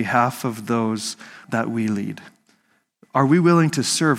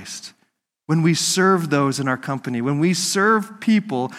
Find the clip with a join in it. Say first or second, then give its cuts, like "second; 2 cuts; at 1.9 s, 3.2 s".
first; 1 cut; at 1.4 s